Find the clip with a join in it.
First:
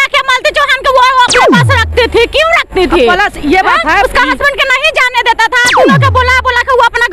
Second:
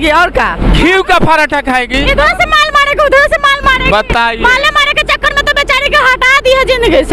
first; 1 cut; at 4.1 s

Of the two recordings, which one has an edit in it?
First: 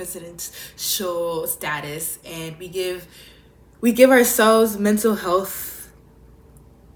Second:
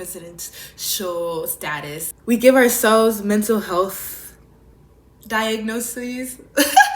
second; 2 cuts; at 2.1 s, 4.7 s

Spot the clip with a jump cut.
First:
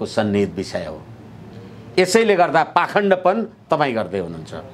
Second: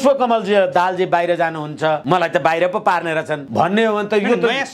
second; 2 cuts; at 2.0 s, 3.4 s

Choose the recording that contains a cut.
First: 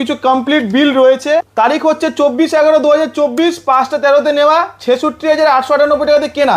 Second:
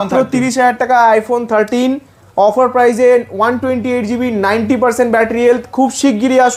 first; 1 cut; at 1.5 s

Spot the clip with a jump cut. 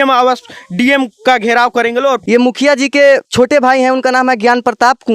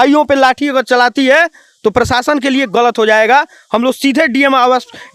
first; 1 cut; at 2.2 s

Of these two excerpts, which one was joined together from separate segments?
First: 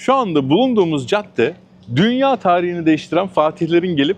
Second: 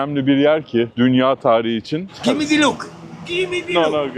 second; 2 cuts; at 0.9 s, 2.2 s

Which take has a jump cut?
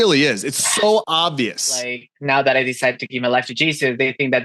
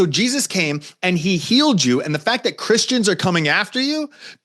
first; 1 cut; at 2.1 s

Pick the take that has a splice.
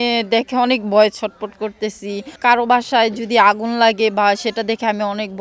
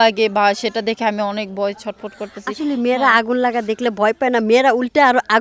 first; 1 cut; at 2.4 s

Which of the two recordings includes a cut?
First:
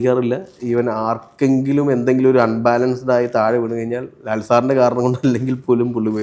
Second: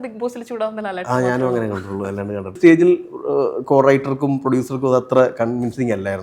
second; 1 cut; at 2.6 s

